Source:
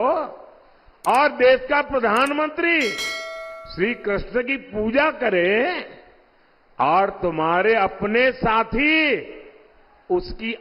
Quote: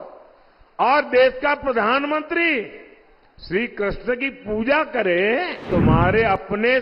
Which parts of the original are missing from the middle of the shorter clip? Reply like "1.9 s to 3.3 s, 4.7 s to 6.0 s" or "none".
5.9 s to 7.2 s